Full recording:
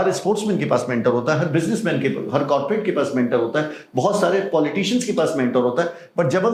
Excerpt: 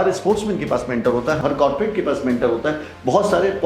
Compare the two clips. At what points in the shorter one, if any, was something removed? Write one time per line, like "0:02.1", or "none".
0:01.4